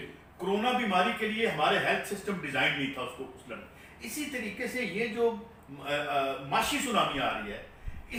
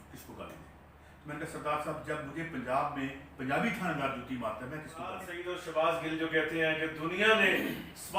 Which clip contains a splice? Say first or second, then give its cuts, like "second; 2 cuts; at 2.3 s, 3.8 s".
second; 1 cut; at 5.3 s